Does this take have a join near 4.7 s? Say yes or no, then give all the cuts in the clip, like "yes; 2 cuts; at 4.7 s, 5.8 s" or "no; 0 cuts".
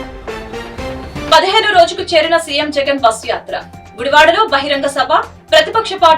no; 1 cut; at 1.3 s